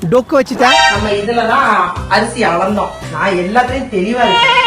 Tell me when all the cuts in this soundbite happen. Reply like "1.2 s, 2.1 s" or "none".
1.0 s